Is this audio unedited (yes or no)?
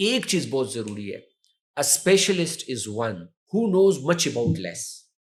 yes